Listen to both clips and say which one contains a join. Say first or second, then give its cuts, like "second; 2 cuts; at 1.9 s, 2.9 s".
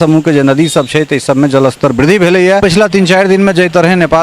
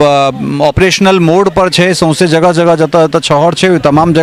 first; 1 cut; at 2.6 s